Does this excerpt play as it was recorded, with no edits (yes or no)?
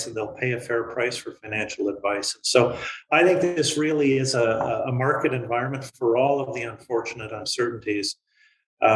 yes